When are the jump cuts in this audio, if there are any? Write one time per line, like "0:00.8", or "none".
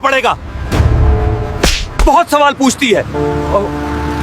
0:02.0

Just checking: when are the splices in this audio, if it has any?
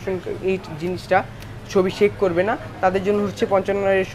none

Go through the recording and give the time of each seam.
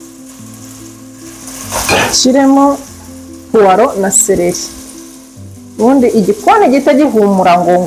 0:01.1

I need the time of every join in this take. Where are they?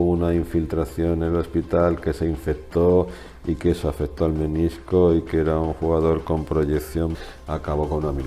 0:07.3

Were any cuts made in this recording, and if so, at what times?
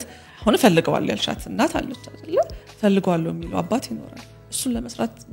none

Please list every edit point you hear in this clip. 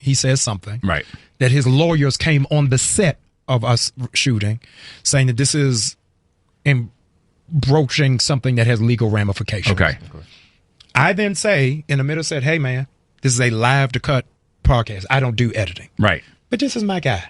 none

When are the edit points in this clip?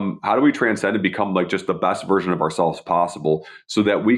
none

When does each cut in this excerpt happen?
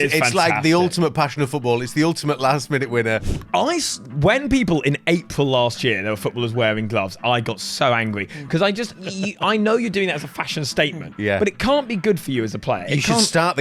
0:03.3

